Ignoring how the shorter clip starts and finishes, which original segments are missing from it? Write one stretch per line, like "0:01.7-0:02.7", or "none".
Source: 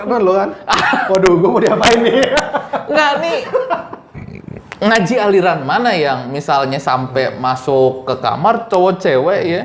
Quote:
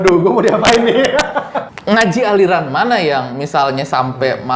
0:02.8-0:04.5